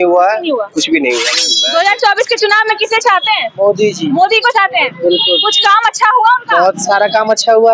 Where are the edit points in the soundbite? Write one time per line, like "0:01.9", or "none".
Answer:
0:01.2